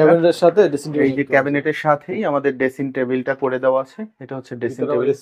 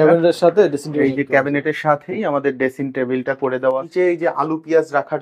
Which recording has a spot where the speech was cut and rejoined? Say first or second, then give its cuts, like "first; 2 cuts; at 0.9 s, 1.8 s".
second; 1 cut; at 3.9 s